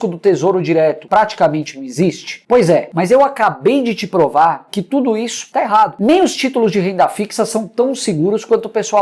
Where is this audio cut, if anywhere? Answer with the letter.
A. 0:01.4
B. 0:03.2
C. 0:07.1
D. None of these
D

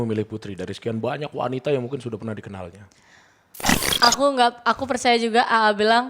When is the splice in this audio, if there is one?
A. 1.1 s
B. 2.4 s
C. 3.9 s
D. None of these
C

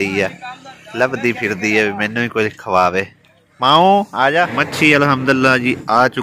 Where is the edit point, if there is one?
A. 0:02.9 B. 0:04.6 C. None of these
B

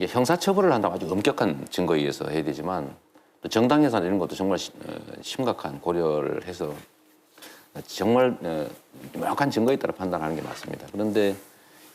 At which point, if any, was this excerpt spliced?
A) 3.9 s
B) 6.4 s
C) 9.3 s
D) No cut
B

